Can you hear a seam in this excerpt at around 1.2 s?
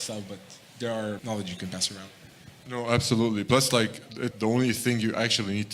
yes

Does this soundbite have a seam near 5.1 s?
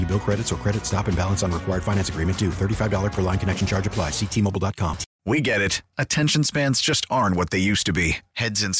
yes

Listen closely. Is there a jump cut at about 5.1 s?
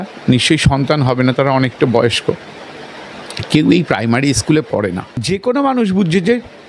yes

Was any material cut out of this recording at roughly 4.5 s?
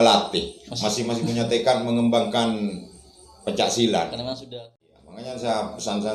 yes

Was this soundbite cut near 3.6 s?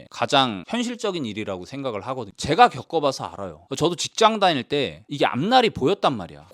no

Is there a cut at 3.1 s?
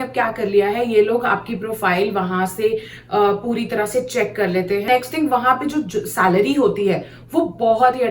no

